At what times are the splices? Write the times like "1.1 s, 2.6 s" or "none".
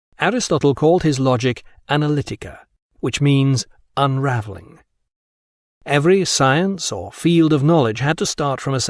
none